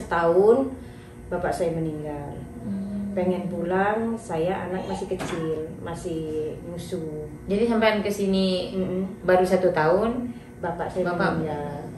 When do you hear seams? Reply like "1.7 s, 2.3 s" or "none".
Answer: none

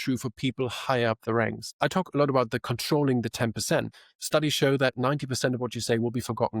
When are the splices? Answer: 1.7 s, 3.9 s

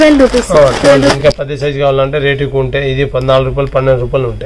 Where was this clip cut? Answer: 1.2 s

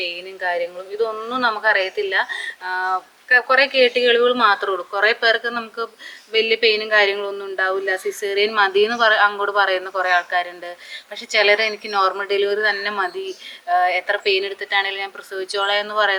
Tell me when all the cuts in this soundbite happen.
none

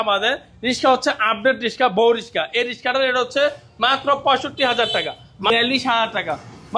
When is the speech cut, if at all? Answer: 5.5 s

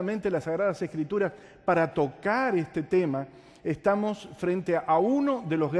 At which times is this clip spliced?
1.9 s

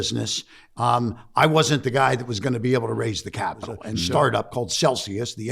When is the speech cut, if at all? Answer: 4.0 s

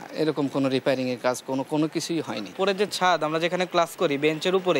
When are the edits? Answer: 2.5 s

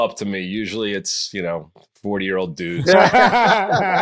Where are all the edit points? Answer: 2.8 s

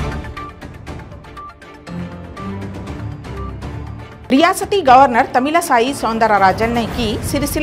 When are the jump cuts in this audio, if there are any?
4.2 s

